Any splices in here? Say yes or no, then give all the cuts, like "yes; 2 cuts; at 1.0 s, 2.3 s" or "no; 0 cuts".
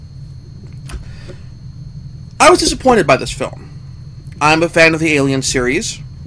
yes; 1 cut; at 2.4 s